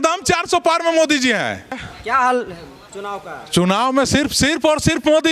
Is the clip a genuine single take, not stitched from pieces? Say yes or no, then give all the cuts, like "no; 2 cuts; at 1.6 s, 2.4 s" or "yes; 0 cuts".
no; 1 cut; at 1.9 s